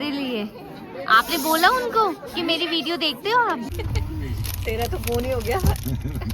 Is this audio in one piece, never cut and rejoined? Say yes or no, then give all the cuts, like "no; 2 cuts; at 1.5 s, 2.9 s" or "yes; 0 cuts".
no; 1 cut; at 3.7 s